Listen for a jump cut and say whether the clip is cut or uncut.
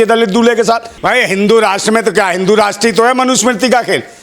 cut